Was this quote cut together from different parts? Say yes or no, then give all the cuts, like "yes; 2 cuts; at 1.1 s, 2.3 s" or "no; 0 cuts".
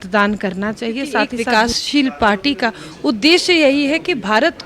yes; 1 cut; at 1.3 s